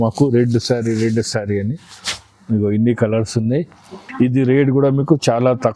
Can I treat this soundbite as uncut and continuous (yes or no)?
yes